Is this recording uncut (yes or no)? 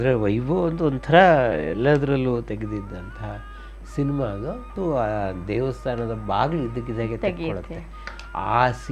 no